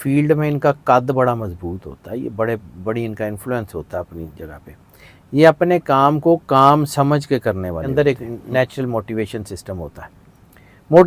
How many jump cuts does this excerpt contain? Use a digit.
1